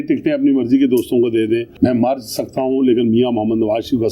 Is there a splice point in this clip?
yes; 1 cut; at 1.7 s

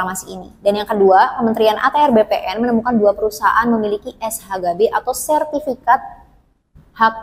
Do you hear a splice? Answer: no; 0 cuts

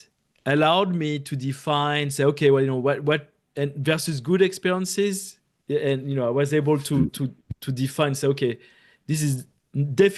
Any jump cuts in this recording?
no; 0 cuts

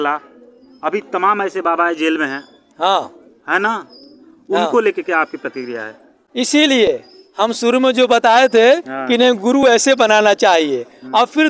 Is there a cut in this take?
no; 0 cuts

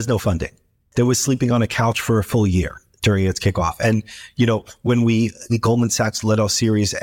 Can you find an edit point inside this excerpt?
no; 0 cuts

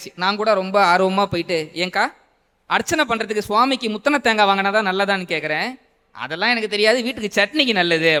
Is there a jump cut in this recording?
no; 0 cuts

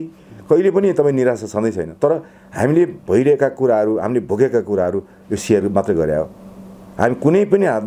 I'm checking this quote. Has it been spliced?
no; 0 cuts

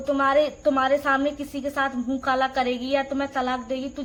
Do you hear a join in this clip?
no; 0 cuts

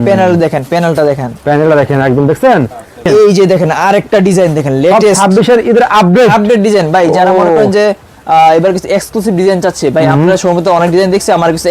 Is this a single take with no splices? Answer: no; 1 cut; at 3.1 s

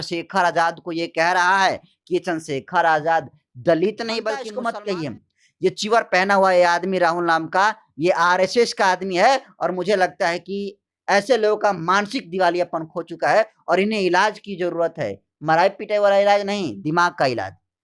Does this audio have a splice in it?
yes; 1 cut; at 4.5 s

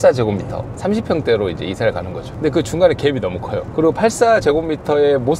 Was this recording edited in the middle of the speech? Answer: no; 0 cuts

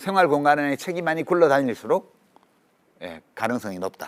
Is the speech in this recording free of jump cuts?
yes; 0 cuts

